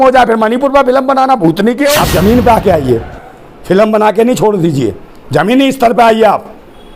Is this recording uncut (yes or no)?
no